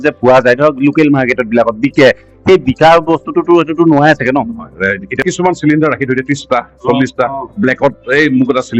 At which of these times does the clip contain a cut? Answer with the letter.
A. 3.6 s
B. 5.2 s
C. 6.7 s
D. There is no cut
B